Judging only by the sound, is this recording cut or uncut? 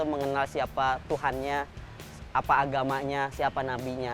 uncut